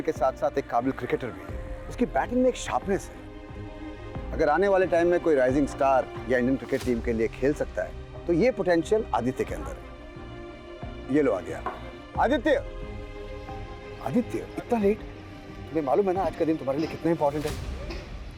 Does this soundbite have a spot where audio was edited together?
no; 0 cuts

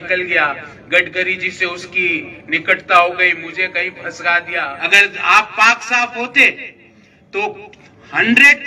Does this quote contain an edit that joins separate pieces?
yes; 1 cut; at 4.8 s

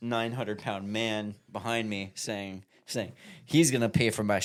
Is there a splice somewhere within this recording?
no; 0 cuts

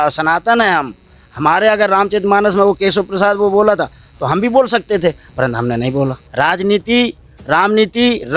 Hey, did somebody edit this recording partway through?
yes; 1 cut; at 6.2 s

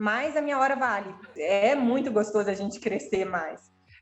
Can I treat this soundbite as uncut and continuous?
no; 1 cut; at 1.2 s

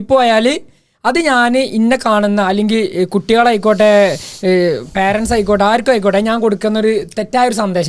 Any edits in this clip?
no; 0 cuts

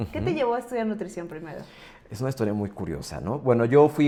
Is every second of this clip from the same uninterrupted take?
yes; 0 cuts

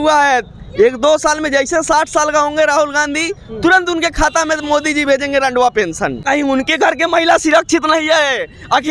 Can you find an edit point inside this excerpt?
yes; 1 cut; at 6.2 s

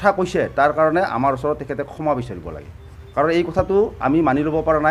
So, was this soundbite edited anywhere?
no; 0 cuts

